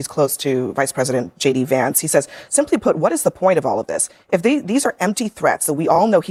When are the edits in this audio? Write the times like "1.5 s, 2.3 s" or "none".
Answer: none